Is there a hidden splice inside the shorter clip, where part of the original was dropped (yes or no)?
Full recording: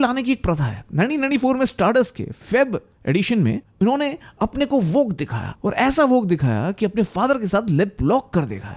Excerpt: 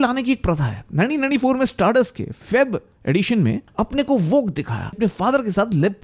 yes